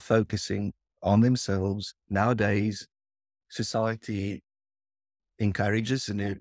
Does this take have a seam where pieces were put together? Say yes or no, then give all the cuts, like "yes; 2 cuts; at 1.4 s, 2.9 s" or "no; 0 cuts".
no; 0 cuts